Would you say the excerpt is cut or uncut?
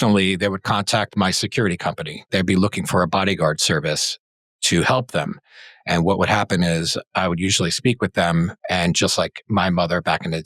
uncut